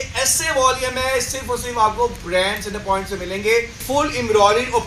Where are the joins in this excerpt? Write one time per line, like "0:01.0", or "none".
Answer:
0:03.8